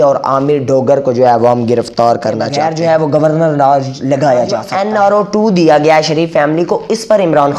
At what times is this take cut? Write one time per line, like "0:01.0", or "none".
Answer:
0:02.8
0:04.7